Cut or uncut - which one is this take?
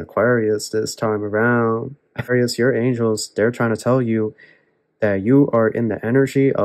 cut